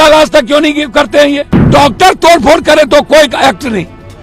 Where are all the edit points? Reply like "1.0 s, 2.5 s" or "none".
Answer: 1.7 s